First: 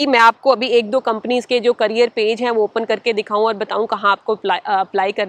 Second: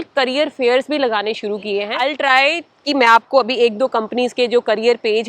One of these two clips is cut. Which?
second; 1 cut; at 1.9 s

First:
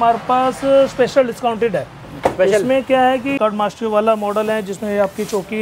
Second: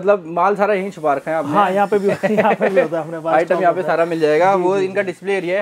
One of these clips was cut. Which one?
first; 1 cut; at 3.4 s

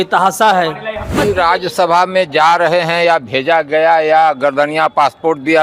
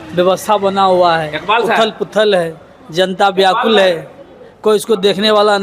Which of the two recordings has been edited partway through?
first; 1 cut; at 1.1 s

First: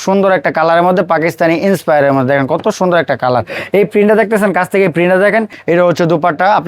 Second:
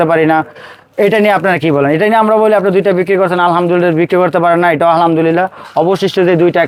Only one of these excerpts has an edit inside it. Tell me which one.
first; 1 cut; at 5.5 s

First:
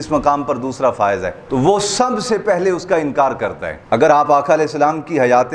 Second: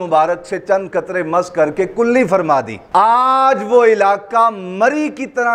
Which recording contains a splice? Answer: first; 2 cuts; at 1.4 s, 3.7 s

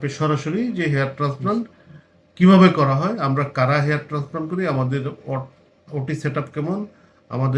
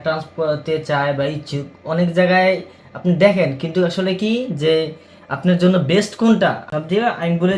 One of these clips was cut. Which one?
second; 1 cut; at 6.7 s

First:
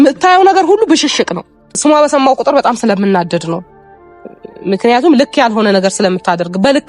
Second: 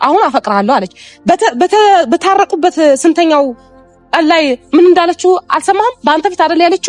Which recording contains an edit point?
first; 1 cut; at 1.8 s

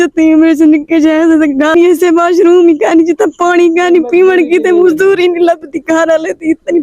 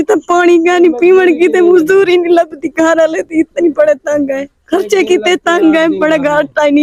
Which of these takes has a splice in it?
first; 1 cut; at 1.7 s

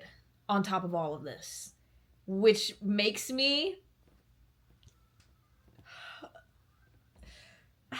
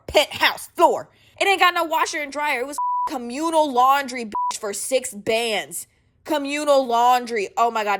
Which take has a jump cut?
second; 1 cut; at 1.2 s

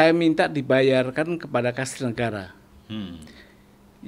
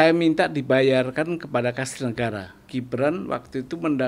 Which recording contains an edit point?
second; 1 cut; at 2.6 s

